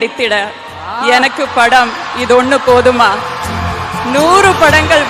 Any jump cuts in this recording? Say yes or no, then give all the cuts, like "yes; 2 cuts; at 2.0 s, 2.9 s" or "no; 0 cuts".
no; 0 cuts